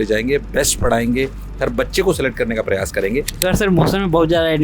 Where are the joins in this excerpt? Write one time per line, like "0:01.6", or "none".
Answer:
0:03.3